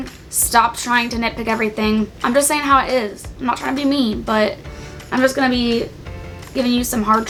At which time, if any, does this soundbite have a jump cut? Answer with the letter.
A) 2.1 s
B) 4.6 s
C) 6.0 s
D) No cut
D